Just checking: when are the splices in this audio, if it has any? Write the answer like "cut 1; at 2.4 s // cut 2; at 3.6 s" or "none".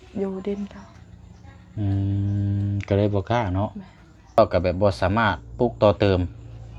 cut 1; at 4.4 s